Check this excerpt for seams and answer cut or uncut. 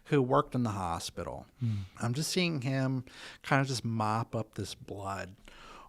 cut